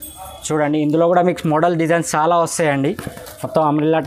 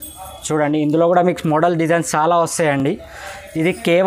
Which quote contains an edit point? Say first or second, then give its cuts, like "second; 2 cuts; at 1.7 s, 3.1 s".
first; 1 cut; at 2.8 s